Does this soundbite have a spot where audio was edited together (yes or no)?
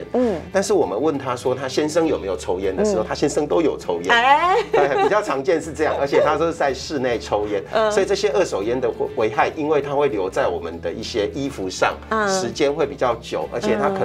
no